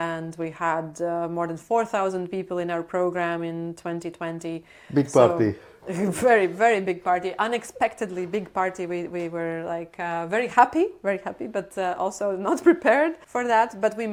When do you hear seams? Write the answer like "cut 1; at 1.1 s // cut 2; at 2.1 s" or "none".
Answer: none